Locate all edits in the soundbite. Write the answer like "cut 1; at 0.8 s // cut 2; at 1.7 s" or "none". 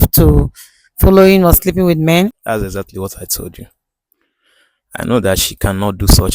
cut 1; at 2.3 s